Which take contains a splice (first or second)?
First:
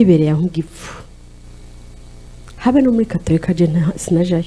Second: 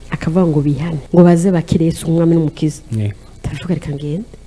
second